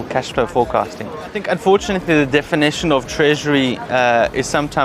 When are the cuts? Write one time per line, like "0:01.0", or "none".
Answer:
0:01.4